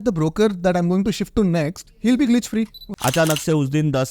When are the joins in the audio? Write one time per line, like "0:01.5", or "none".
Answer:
0:02.8